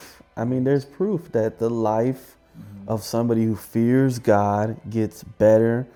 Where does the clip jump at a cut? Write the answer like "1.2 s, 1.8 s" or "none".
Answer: none